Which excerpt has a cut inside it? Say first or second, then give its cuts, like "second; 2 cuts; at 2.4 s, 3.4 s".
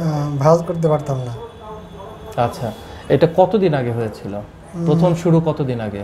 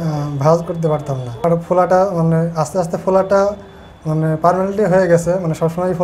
second; 1 cut; at 1.4 s